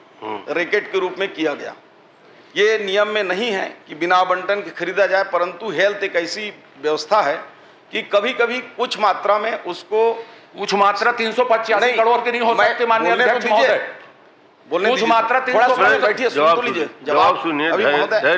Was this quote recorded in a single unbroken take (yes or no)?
yes